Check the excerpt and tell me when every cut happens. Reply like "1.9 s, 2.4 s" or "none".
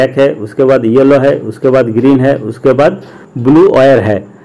none

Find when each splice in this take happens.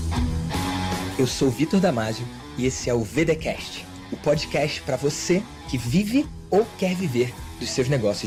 none

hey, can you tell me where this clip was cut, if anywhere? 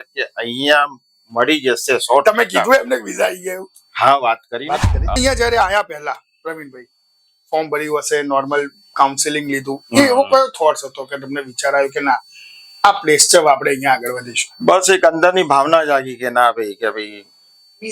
5.2 s

